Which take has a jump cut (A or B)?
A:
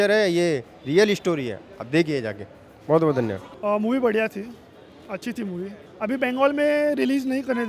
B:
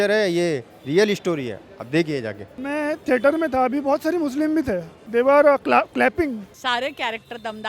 B